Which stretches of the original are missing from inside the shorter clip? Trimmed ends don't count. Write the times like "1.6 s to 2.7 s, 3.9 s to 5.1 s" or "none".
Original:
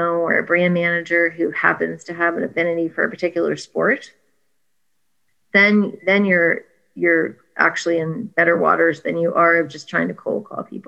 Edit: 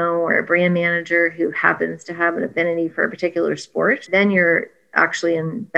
4.0 s to 6.0 s, 6.7 s to 7.4 s